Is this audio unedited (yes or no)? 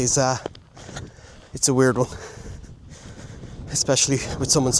yes